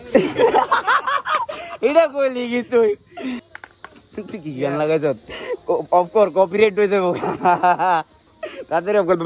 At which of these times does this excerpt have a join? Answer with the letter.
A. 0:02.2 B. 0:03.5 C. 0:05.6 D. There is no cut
B